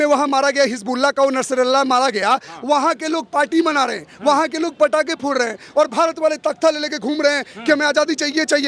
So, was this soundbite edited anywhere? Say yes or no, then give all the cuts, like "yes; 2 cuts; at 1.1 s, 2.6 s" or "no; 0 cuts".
no; 0 cuts